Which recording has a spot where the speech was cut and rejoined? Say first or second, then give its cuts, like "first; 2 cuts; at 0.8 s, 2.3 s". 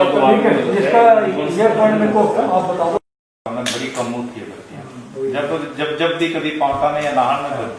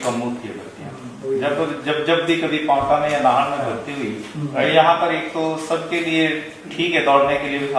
first; 1 cut; at 3.0 s